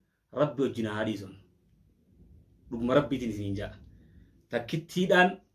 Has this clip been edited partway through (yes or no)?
no